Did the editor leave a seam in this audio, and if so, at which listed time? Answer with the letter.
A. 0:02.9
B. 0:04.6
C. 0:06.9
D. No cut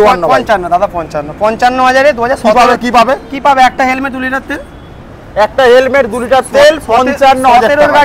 D